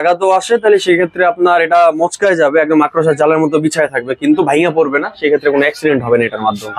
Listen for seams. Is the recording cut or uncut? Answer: uncut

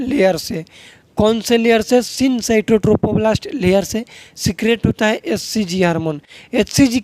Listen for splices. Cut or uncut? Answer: uncut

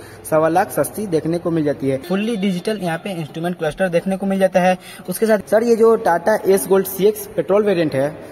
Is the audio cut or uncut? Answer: cut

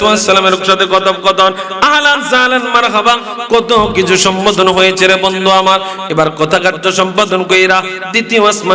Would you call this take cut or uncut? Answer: uncut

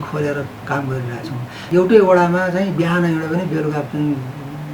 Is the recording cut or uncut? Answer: cut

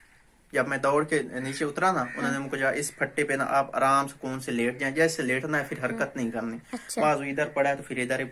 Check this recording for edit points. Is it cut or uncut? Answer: uncut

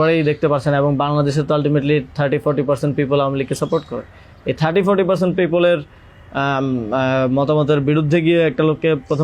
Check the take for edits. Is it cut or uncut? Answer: uncut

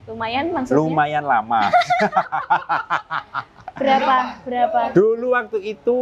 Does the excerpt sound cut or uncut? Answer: uncut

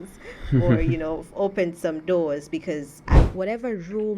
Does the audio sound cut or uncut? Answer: cut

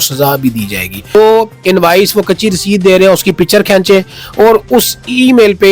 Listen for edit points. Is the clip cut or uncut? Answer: cut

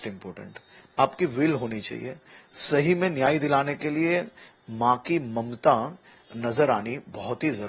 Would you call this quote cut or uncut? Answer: uncut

